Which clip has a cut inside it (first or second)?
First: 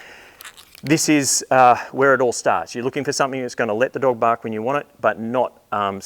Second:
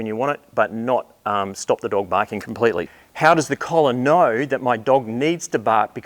second